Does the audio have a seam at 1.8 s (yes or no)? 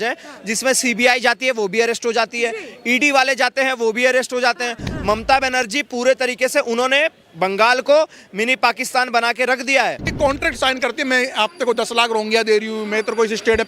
no